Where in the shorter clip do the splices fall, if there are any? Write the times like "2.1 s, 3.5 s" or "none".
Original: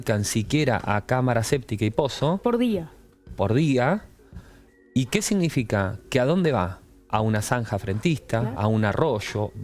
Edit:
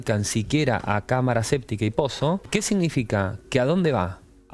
2.4 s